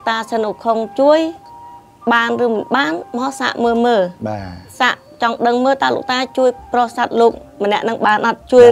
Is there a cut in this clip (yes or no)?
no